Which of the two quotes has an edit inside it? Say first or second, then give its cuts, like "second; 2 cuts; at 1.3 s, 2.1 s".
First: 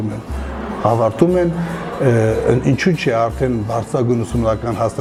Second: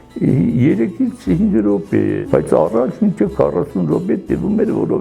second; 1 cut; at 2.2 s